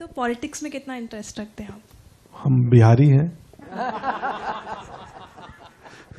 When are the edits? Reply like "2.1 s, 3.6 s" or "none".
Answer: none